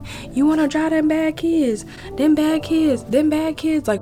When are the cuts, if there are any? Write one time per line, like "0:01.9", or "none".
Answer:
none